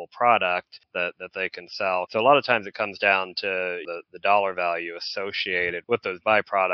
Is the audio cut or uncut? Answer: cut